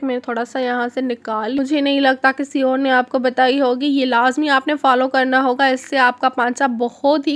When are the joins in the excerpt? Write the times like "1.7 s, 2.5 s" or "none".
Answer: 1.6 s